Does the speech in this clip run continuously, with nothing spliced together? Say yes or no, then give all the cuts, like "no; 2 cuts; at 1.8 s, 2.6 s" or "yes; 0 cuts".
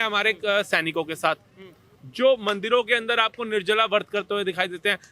yes; 0 cuts